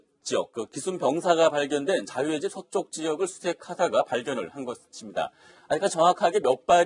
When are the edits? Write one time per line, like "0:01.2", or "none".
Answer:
0:03.2